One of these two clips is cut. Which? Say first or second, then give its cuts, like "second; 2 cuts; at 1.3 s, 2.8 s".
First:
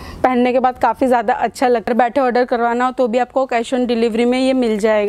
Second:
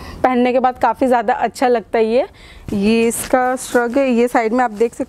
first; 1 cut; at 1.9 s